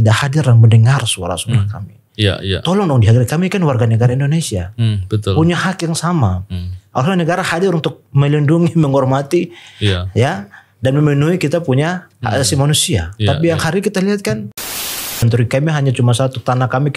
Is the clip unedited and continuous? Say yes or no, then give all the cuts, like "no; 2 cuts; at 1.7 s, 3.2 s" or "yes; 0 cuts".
no; 1 cut; at 15.0 s